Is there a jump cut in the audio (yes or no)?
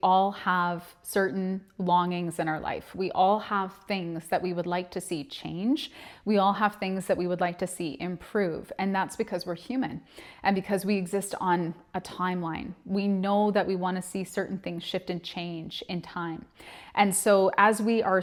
no